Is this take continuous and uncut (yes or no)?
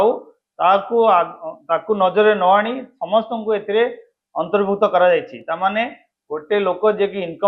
yes